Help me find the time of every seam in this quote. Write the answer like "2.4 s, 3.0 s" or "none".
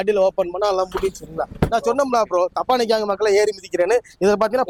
none